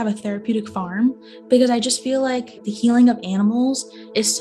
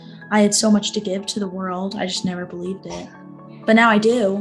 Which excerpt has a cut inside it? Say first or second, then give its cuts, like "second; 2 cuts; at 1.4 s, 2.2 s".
first; 1 cut; at 2.6 s